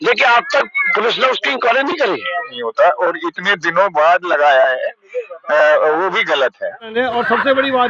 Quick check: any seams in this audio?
yes; 2 cuts; at 2.6 s, 6.9 s

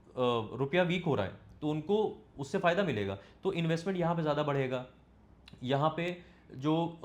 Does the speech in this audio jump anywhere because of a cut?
no; 0 cuts

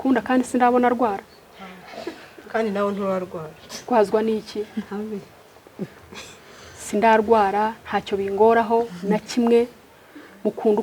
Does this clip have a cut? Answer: no; 0 cuts

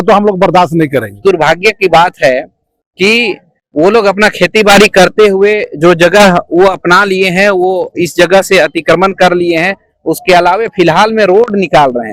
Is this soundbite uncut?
no; 1 cut; at 1.2 s

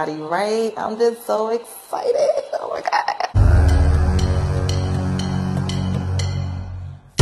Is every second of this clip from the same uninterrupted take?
no; 1 cut; at 3.4 s

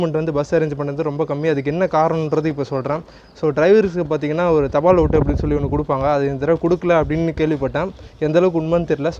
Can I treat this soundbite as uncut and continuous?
yes; 0 cuts

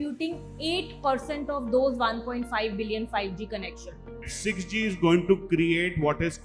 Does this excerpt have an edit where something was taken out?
yes; 1 cut; at 4.3 s

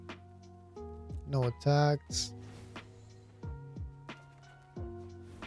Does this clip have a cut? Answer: no; 0 cuts

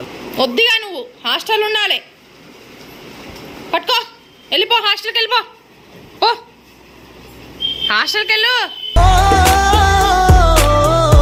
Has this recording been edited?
no; 0 cuts

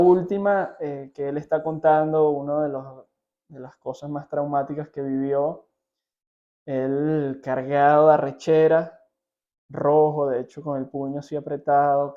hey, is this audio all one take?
yes; 0 cuts

